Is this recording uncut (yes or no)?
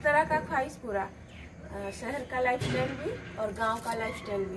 yes